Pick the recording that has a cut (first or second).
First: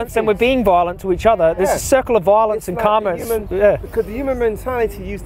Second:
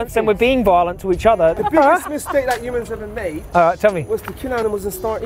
second